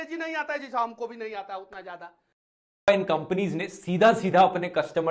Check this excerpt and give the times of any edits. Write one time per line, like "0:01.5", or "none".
0:02.9